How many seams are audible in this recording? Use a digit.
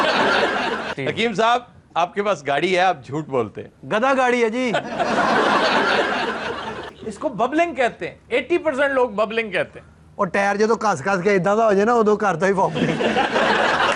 2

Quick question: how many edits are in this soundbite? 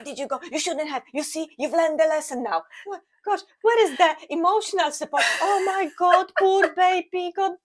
0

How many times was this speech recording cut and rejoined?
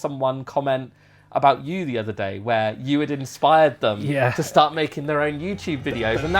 0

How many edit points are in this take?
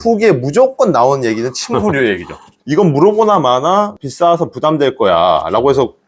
2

